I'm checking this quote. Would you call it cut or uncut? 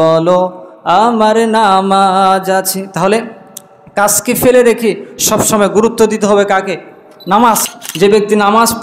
cut